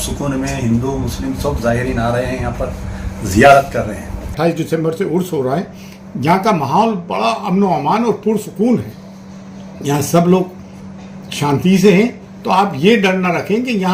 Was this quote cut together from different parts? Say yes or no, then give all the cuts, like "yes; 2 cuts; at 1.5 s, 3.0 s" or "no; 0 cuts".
yes; 1 cut; at 4.3 s